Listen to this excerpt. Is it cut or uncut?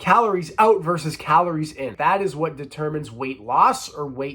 cut